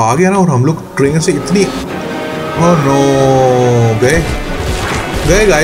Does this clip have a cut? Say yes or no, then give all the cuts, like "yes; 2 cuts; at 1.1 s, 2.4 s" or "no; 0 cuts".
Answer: no; 0 cuts